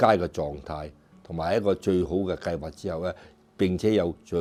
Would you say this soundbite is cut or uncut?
uncut